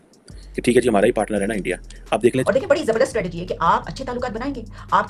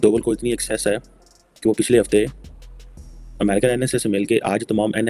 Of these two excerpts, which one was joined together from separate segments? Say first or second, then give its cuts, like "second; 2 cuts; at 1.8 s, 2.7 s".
first; 1 cut; at 2.4 s